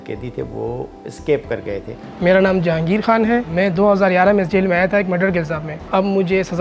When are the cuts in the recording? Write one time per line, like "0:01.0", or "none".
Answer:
0:02.0
0:03.5
0:05.9